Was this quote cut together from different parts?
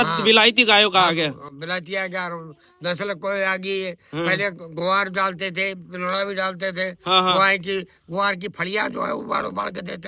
no; 0 cuts

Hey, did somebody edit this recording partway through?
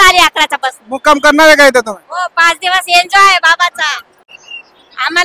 yes; 1 cut; at 4.3 s

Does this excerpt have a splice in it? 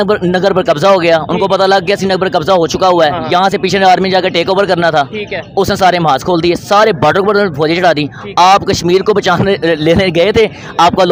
no; 0 cuts

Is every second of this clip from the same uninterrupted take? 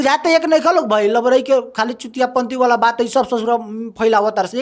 yes; 0 cuts

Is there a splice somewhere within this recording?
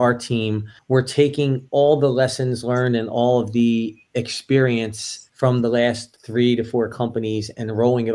no; 0 cuts

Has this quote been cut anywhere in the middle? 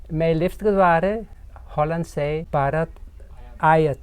yes; 1 cut; at 2.5 s

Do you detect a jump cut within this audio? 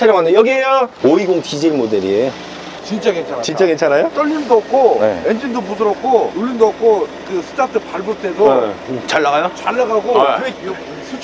yes; 3 cuts; at 0.9 s, 4.1 s, 6.3 s

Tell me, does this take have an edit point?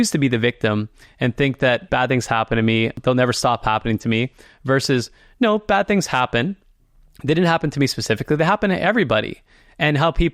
yes; 2 cuts; at 1.9 s, 3.0 s

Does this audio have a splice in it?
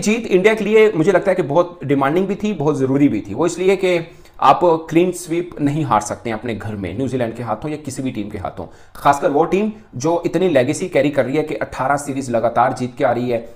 no; 0 cuts

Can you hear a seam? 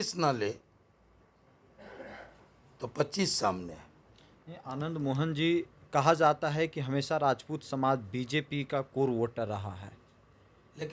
no; 0 cuts

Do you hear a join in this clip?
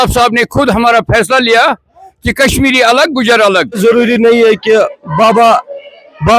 yes; 1 cut; at 3.7 s

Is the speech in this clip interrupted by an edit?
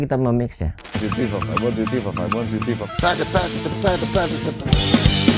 yes; 2 cuts; at 2.9 s, 4.6 s

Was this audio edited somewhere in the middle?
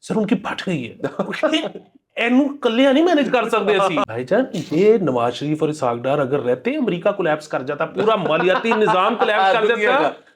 yes; 1 cut; at 4.0 s

